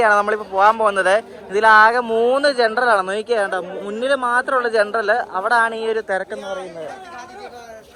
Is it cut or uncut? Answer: uncut